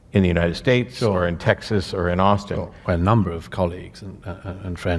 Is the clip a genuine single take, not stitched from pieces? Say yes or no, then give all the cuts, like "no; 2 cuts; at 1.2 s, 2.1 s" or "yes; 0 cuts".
no; 1 cut; at 2.8 s